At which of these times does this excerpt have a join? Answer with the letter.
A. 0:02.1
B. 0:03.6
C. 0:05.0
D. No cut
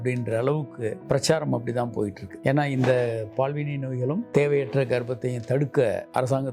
D